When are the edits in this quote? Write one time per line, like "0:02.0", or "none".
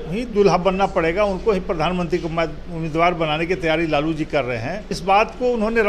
0:05.0